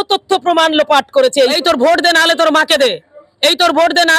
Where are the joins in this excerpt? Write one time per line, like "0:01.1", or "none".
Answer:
0:01.6